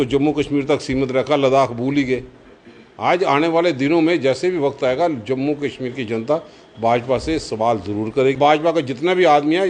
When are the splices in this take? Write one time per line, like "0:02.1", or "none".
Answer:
0:08.4